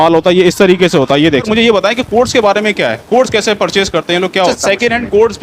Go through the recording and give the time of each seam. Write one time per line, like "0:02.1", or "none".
0:01.5
0:04.5